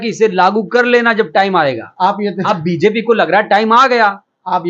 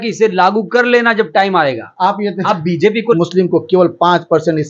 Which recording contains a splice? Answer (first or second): second